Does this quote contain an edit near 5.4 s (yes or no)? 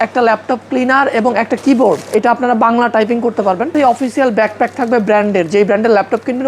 no